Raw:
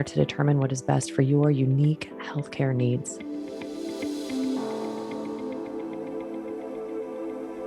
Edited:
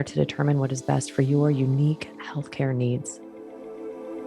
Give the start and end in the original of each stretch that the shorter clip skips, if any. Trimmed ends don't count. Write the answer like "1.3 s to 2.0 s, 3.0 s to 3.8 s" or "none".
3.1 s to 6.2 s